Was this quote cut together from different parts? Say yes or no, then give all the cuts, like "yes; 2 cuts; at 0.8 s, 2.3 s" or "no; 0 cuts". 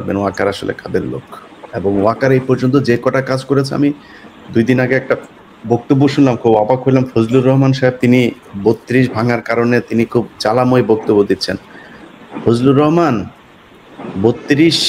no; 0 cuts